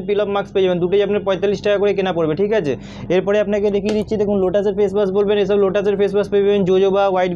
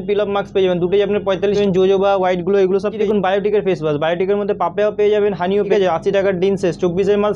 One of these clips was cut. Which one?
second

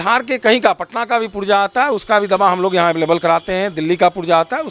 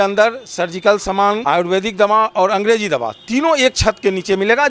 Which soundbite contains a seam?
second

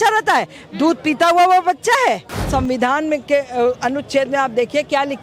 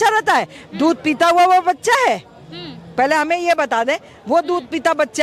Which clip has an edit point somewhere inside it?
first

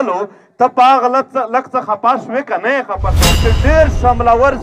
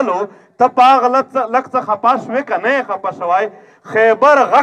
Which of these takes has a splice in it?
first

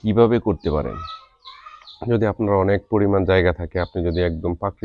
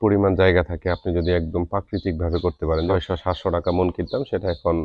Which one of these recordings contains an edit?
second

